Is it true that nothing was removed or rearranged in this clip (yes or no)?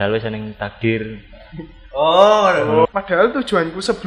no